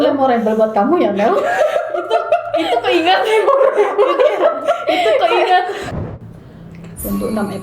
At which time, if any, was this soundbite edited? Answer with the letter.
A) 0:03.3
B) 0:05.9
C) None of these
B